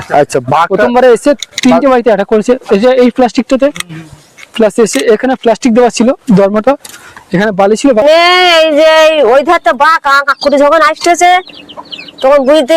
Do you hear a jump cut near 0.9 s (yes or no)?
no